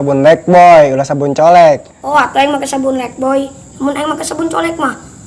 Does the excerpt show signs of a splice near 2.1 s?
yes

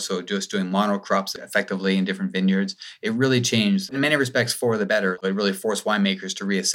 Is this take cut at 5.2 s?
yes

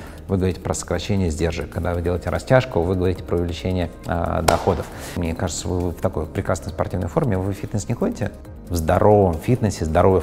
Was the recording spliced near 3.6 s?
no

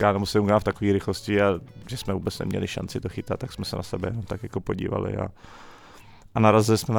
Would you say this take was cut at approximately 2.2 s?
no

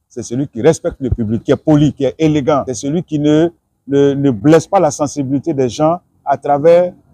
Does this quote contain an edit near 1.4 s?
yes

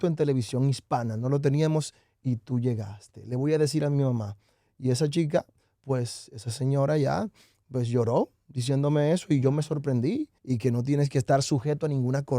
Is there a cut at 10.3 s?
yes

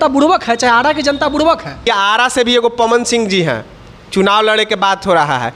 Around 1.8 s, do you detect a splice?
yes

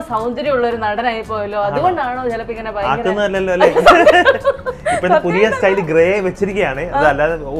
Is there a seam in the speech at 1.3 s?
no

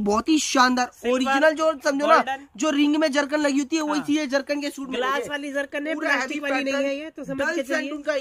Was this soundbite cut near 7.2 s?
no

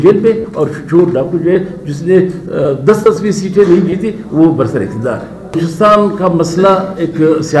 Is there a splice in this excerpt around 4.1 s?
no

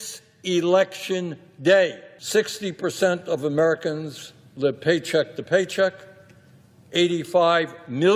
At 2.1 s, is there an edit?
yes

